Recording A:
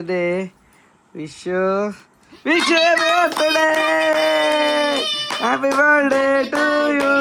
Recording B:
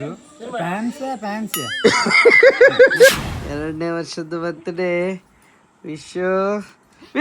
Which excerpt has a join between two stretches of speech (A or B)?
B